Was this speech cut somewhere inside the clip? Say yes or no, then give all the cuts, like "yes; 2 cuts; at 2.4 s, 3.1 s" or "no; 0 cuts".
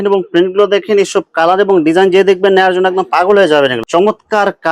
yes; 1 cut; at 3.8 s